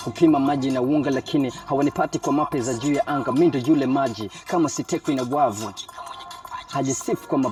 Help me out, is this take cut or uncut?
uncut